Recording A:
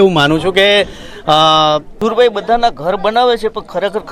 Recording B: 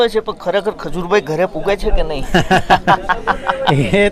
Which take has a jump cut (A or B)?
A